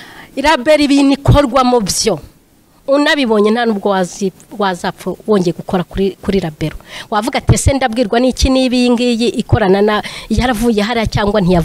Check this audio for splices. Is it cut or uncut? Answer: uncut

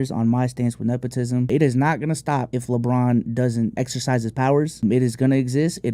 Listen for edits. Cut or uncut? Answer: cut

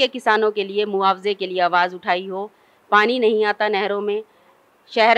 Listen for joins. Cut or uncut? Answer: uncut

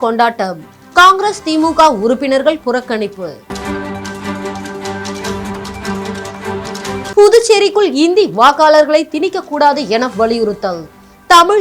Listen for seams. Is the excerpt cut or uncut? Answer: uncut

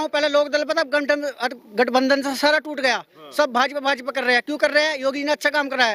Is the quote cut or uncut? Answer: uncut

